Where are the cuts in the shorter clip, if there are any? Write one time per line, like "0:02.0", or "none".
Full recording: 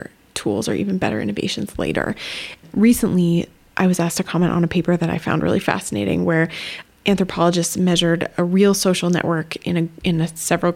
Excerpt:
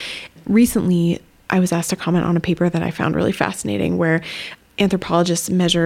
none